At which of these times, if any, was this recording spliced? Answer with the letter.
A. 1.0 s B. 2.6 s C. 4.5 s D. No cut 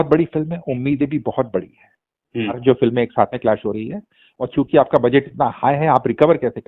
B